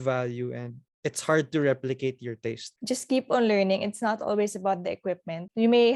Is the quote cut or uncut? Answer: cut